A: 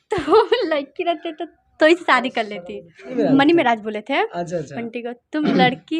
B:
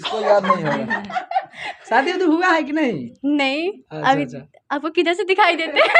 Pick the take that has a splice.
A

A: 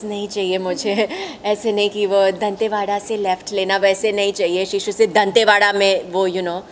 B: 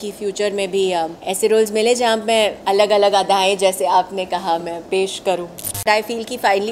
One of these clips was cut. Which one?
B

